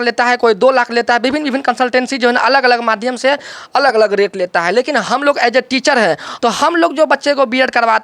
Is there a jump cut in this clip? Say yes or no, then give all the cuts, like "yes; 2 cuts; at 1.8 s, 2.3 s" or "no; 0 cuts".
yes; 1 cut; at 6.3 s